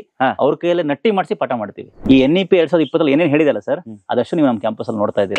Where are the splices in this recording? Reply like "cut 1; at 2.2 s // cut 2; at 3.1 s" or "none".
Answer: cut 1; at 2.0 s